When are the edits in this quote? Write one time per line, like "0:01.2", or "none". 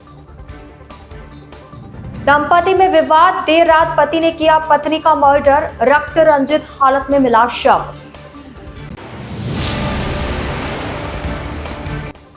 0:01.5